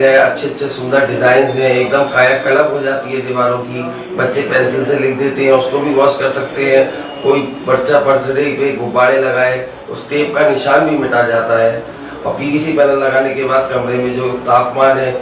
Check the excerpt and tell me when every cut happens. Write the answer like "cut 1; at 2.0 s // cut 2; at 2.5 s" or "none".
none